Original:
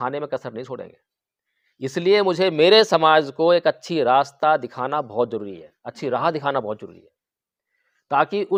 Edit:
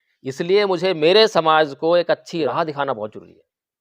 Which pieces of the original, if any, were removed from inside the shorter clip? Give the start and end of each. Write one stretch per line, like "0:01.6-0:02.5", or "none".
0:04.0-0:06.1

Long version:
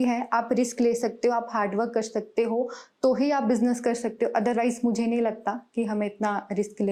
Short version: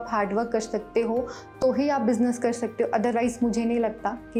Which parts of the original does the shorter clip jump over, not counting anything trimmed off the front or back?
none

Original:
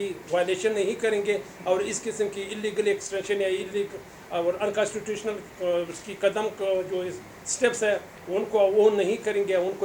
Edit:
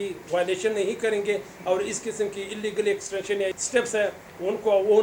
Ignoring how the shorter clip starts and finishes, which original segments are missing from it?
0:03.5-0:07.4

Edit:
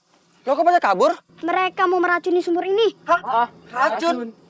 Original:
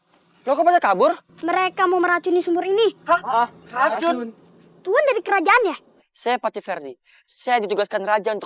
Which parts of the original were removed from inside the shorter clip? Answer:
none

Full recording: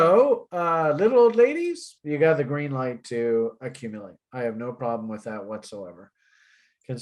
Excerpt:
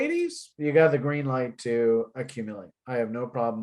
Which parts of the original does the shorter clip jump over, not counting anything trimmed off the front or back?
none

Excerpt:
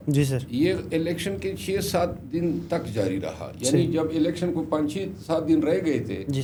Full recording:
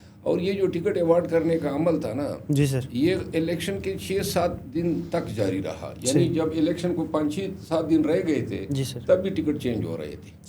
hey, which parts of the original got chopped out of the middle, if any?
none

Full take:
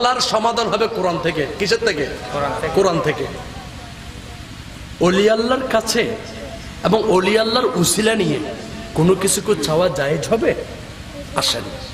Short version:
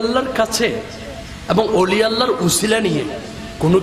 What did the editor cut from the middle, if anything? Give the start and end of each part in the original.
none

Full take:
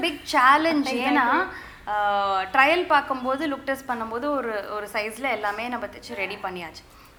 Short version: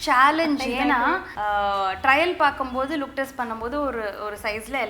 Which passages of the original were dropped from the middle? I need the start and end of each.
0:01.6-0:01.8

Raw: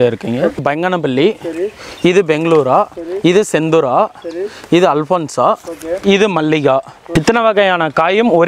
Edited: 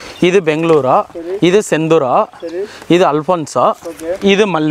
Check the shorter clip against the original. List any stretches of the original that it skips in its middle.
none

